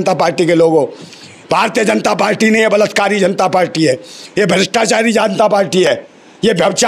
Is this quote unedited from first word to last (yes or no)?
yes